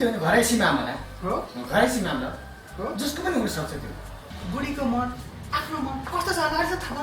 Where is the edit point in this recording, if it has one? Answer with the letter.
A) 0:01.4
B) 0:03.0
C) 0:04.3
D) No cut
C